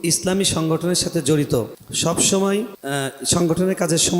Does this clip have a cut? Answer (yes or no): yes